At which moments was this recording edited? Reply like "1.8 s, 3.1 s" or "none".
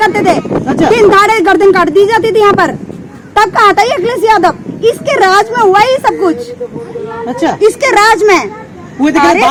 none